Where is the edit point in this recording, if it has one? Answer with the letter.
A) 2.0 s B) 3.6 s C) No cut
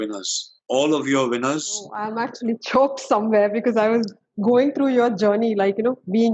A